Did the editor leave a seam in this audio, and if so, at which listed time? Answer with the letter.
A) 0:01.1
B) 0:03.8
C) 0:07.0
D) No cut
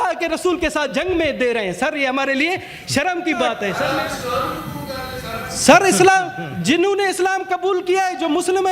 B